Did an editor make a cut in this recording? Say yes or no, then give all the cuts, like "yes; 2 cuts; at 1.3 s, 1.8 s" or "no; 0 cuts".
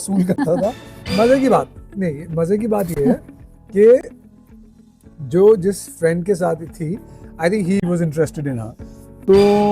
yes; 2 cuts; at 0.9 s, 7.8 s